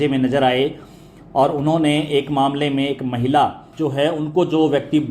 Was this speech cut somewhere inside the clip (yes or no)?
yes